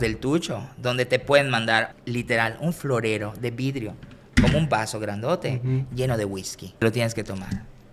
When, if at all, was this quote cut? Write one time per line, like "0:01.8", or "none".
0:01.9
0:06.8